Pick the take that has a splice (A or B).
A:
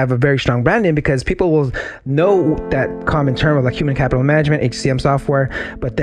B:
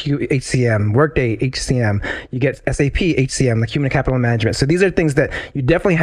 A